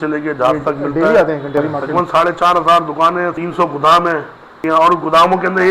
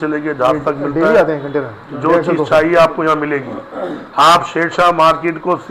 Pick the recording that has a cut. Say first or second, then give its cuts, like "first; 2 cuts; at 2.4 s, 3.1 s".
first; 3 cuts; at 1.6 s, 3.3 s, 4.4 s